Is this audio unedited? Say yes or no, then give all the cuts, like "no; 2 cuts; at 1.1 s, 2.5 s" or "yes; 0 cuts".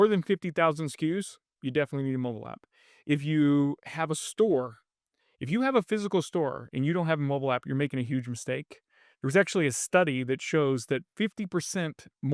yes; 0 cuts